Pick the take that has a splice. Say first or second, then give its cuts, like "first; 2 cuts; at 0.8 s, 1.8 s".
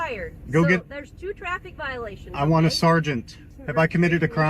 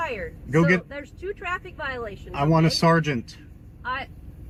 first; 1 cut; at 3.6 s